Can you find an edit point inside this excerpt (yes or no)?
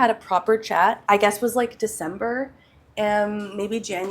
yes